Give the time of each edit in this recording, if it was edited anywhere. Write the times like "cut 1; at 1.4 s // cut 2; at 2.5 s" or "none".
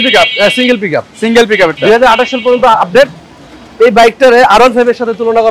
none